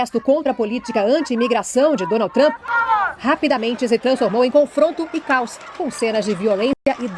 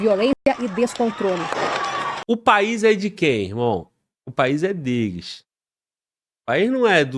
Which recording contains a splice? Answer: second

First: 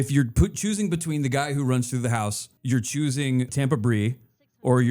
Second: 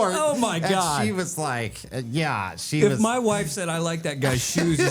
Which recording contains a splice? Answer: first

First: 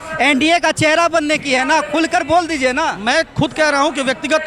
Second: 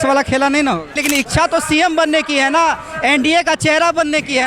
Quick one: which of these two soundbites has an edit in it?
second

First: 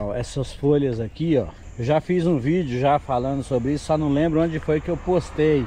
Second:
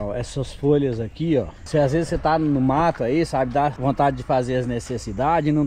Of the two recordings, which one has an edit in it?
second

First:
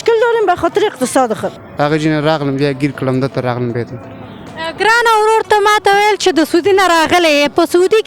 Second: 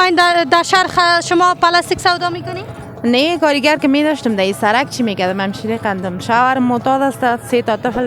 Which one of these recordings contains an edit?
first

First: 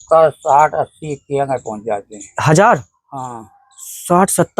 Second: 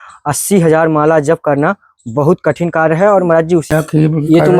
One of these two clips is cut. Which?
second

